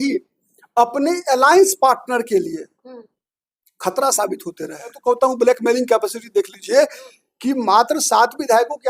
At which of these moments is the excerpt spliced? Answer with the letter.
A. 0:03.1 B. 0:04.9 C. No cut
B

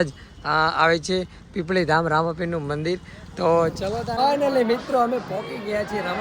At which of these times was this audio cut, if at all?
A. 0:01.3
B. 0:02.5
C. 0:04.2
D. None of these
C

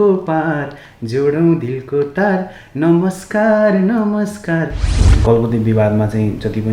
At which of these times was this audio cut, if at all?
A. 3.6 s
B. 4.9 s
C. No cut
B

